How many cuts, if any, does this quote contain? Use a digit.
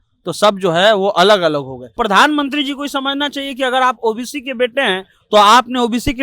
1